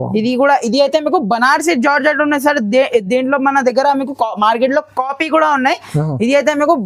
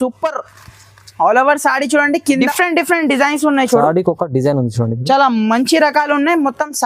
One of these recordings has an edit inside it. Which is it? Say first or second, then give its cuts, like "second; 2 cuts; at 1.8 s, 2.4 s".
second; 1 cut; at 2.4 s